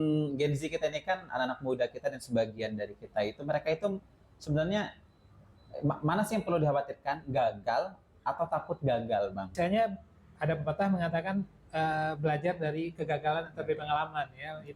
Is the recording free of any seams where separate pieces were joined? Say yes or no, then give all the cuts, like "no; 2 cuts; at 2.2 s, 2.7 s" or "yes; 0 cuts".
no; 1 cut; at 9.5 s